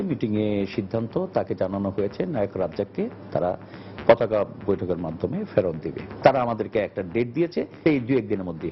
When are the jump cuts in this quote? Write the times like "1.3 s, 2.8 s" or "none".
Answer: 7.8 s